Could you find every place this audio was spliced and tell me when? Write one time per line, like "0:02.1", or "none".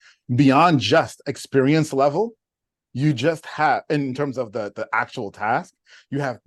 none